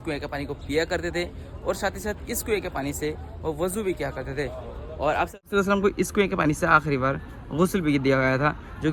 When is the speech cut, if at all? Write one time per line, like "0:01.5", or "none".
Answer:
none